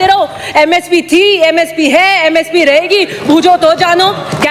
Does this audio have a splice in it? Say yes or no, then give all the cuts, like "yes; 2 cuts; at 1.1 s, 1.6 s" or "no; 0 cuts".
no; 0 cuts